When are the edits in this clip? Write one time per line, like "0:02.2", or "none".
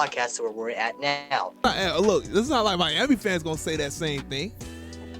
0:01.7